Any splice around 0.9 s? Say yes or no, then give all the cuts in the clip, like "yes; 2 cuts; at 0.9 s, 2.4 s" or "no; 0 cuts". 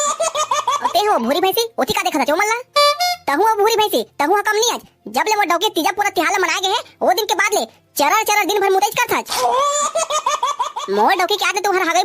yes; 1 cut; at 0.9 s